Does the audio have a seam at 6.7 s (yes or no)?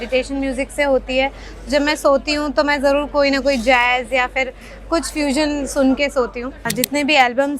yes